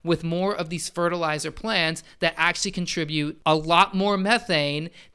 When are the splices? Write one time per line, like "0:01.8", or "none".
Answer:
0:03.4